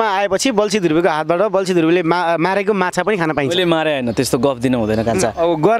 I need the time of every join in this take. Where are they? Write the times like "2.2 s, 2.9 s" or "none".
none